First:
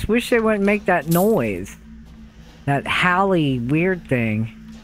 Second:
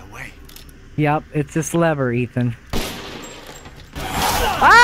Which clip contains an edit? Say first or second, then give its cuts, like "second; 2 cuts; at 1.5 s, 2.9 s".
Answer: second; 1 cut; at 3.9 s